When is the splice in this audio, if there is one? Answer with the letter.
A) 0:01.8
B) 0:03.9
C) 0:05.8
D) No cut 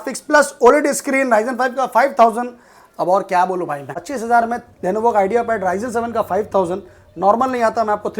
B